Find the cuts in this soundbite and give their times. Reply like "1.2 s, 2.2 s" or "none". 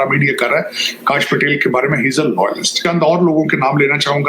2.8 s

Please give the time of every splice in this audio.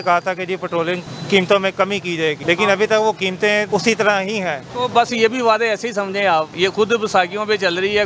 2.4 s, 3.7 s, 4.6 s, 6.5 s

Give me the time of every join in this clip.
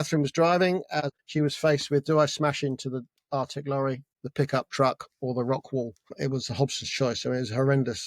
1.1 s

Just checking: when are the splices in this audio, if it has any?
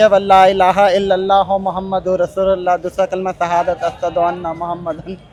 none

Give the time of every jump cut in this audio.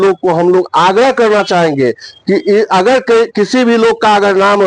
none

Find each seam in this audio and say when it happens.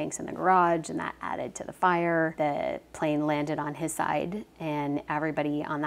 2.3 s

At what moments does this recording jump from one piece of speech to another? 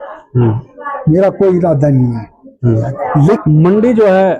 3.4 s

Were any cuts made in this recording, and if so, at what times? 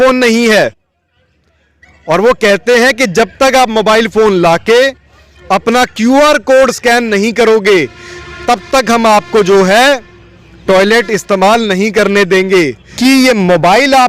12.8 s

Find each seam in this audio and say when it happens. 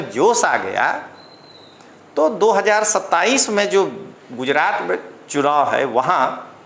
none

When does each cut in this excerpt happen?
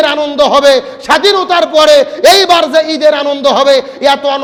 none

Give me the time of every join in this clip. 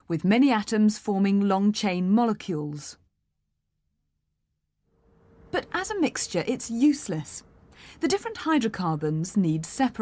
none

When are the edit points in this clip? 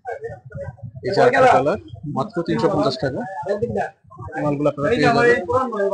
none

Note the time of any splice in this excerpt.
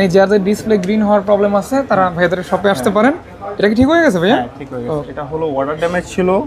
4.8 s

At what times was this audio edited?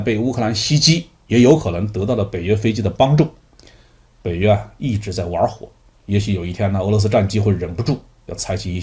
none

